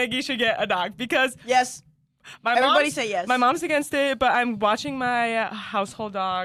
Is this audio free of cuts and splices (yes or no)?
yes